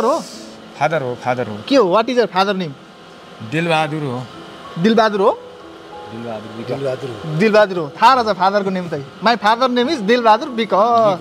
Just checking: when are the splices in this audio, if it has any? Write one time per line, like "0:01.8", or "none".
none